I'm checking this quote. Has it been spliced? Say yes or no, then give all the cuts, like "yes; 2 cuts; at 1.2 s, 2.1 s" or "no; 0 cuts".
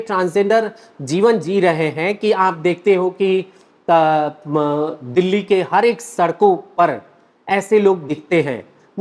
no; 0 cuts